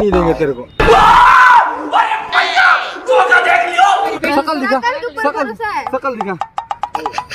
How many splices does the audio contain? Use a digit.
0